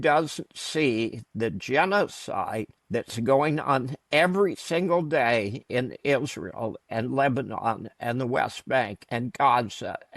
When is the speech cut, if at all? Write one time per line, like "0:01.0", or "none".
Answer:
0:02.7
0:04.0
0:05.6